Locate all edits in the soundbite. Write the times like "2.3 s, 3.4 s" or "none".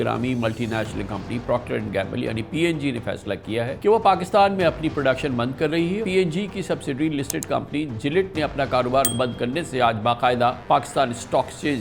3.7 s, 6.0 s, 9.1 s, 10.6 s